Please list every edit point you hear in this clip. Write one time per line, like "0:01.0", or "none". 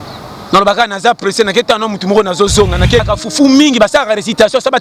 0:03.1